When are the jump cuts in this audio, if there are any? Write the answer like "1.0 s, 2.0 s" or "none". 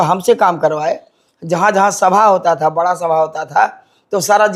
none